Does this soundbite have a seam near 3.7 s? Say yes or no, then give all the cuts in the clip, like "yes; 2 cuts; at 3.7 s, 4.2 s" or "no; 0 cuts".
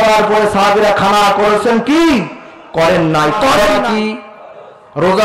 yes; 1 cut; at 3.7 s